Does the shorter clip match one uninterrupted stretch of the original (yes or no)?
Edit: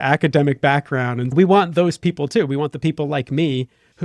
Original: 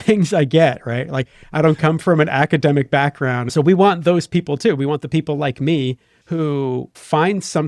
yes